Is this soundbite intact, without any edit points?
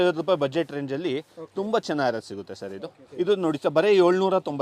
no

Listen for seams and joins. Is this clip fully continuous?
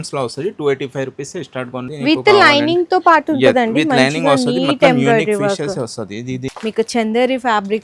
no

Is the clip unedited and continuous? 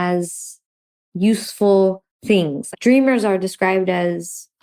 yes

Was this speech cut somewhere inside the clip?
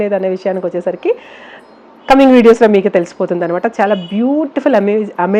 no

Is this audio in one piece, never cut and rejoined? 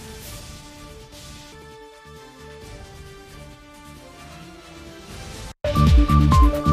no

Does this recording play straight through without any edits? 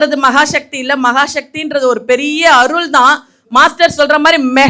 yes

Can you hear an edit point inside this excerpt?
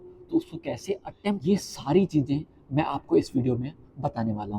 no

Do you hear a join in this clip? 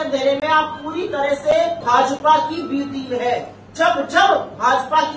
yes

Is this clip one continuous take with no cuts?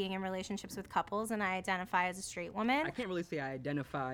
no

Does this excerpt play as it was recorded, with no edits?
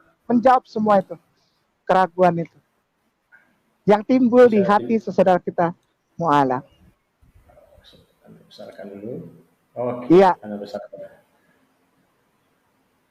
yes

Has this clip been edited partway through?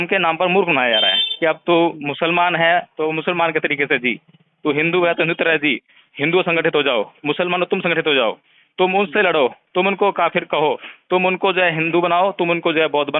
no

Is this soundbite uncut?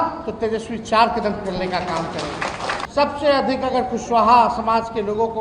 no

